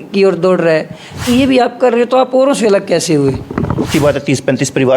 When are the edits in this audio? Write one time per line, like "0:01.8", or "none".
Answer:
0:01.2
0:03.9